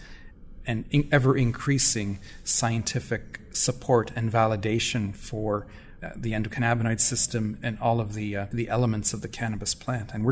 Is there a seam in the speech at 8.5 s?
yes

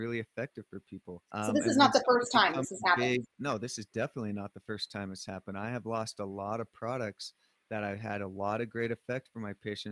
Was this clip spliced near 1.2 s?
yes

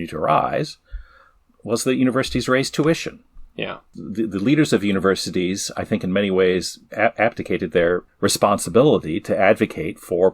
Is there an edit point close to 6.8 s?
yes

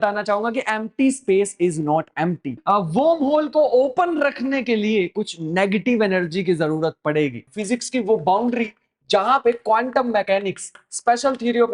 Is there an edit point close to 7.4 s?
yes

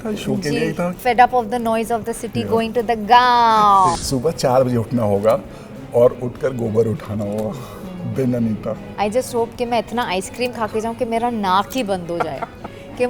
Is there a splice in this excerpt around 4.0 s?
yes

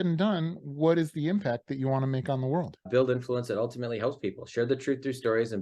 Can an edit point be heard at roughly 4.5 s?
no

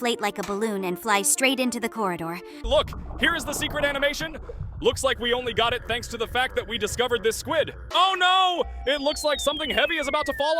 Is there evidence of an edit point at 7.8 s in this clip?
yes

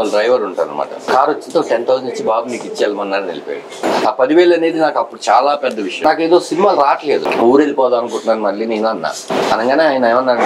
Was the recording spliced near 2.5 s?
no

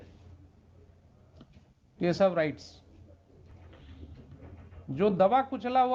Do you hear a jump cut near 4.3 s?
no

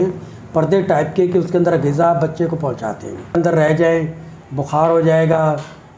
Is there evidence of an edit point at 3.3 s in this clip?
yes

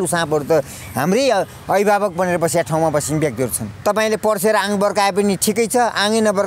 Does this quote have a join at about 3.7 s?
yes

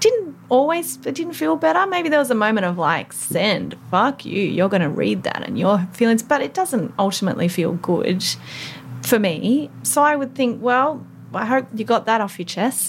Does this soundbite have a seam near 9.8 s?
yes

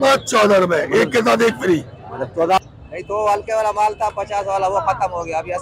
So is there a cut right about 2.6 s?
yes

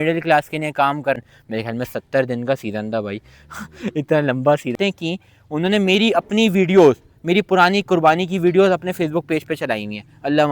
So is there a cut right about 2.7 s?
no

